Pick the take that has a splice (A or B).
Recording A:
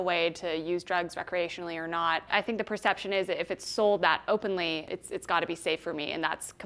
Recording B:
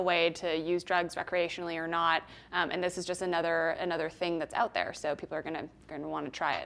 A